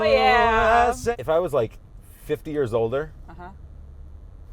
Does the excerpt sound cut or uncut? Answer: cut